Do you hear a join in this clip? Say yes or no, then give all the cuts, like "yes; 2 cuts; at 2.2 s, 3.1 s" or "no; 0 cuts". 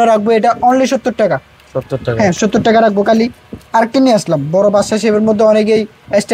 no; 0 cuts